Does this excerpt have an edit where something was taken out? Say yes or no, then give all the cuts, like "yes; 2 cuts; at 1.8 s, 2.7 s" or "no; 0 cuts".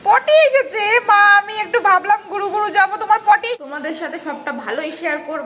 yes; 1 cut; at 3.5 s